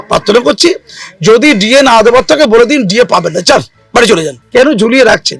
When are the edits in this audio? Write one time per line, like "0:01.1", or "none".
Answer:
0:04.4